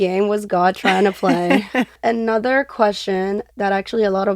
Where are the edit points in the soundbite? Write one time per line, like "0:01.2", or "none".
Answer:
0:01.9